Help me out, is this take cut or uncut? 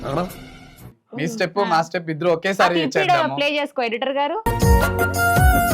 cut